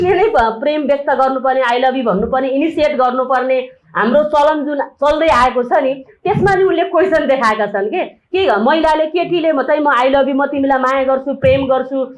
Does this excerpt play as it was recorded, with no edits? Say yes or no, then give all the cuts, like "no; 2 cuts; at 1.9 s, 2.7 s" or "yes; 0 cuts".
yes; 0 cuts